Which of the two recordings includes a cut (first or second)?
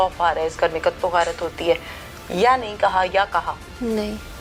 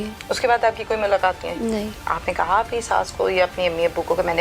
second